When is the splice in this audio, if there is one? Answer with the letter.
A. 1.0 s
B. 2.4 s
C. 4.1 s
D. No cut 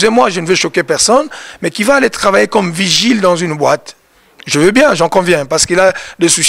D